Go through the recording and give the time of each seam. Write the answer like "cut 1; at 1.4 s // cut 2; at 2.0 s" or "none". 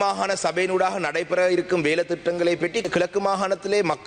cut 1; at 2.8 s